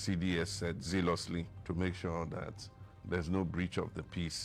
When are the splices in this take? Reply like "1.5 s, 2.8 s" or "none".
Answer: 1.5 s